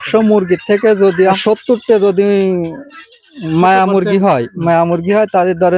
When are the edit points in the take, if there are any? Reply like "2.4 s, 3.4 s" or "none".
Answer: 1.4 s